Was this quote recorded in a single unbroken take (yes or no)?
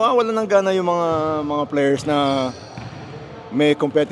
yes